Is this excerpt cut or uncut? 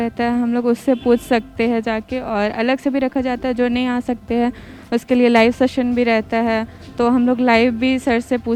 uncut